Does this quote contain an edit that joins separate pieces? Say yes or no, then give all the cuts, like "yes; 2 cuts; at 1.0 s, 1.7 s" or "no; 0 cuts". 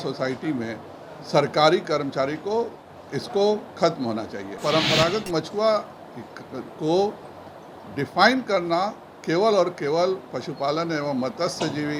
yes; 1 cut; at 4.6 s